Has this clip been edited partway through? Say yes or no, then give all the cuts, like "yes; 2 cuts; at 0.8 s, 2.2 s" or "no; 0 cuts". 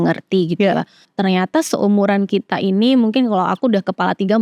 yes; 1 cut; at 1.1 s